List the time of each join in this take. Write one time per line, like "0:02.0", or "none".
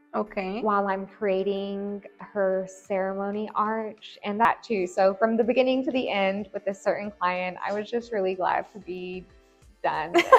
0:04.5